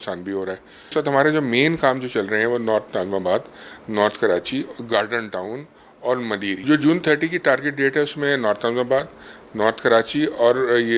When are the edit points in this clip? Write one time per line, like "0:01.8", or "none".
0:00.9
0:06.6

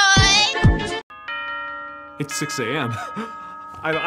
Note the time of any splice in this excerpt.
0:01.0

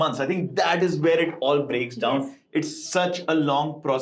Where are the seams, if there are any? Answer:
none

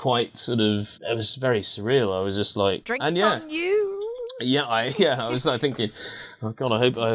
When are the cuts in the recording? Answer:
0:00.9
0:02.9

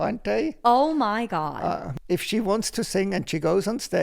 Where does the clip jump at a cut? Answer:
0:01.9

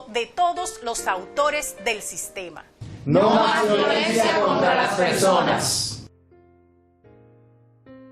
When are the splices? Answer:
none

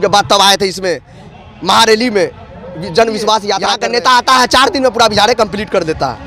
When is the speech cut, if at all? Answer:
0:03.7

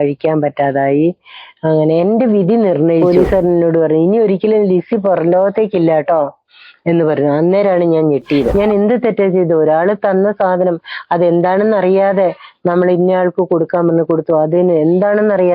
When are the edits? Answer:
0:03.0
0:08.5

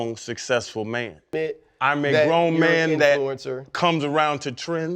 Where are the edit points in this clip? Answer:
0:01.3

